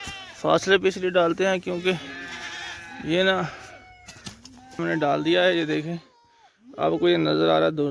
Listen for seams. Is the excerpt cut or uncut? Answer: cut